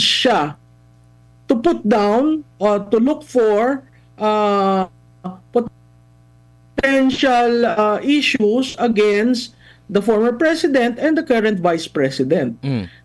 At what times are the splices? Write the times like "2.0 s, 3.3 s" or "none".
none